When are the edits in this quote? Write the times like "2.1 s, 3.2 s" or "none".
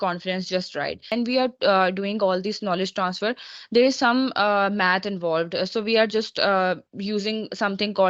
1.1 s